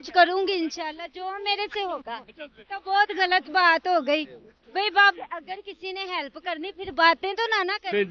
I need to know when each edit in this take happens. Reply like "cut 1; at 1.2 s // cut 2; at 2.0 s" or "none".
cut 1; at 5.1 s